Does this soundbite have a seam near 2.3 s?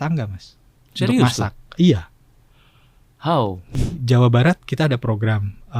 no; 1 cut; at 3.8 s

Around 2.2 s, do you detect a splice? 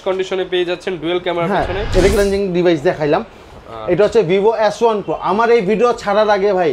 yes; 1 cut; at 2.2 s

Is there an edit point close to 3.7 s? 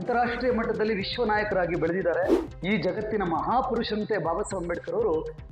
no; 1 cut; at 2.5 s

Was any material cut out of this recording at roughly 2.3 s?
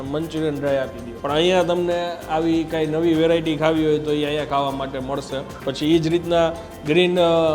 no; 2 cuts; at 1.1 s, 5.5 s

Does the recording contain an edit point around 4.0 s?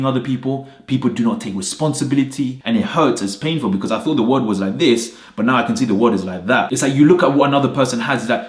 no; 2 cuts; at 2.6 s, 6.7 s

